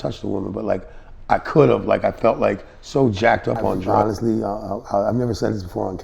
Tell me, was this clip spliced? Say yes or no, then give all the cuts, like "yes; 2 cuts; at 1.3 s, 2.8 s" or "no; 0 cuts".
yes; 1 cut; at 3.9 s